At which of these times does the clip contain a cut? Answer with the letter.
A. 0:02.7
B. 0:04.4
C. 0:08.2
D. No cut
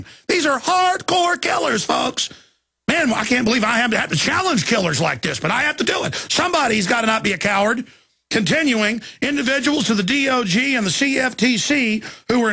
C